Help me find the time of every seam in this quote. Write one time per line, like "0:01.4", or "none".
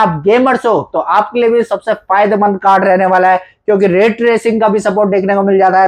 none